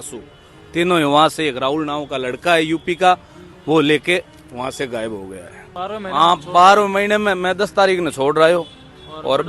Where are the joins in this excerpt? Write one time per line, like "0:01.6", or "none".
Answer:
0:05.8